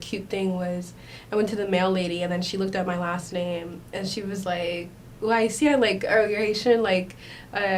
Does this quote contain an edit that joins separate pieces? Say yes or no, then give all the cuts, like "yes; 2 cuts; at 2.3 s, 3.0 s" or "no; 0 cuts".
no; 0 cuts